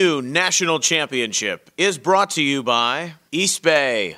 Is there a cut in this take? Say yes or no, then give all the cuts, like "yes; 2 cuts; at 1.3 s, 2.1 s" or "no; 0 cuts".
yes; 1 cut; at 3.1 s